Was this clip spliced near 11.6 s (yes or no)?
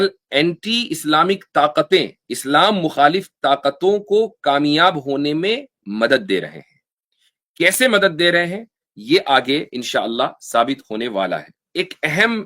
yes